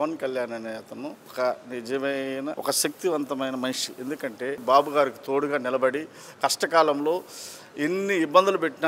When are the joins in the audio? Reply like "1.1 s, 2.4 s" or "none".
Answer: 1.2 s, 2.6 s, 4.6 s